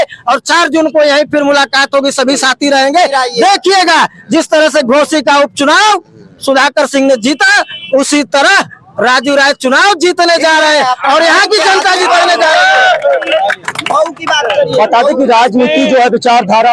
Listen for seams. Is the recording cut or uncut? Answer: uncut